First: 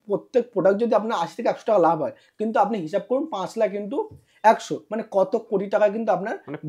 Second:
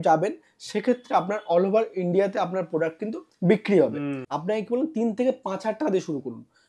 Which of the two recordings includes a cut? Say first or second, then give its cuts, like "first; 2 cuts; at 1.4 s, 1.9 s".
second; 1 cut; at 4.3 s